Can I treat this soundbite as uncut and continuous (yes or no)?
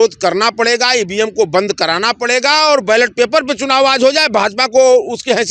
yes